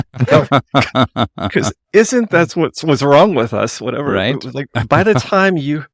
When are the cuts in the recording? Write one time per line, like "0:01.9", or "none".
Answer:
none